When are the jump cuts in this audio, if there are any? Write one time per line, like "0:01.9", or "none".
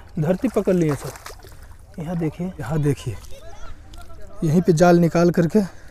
0:02.7